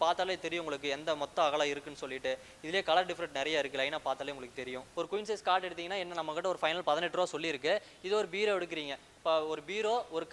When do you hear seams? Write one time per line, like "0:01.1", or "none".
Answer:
0:04.8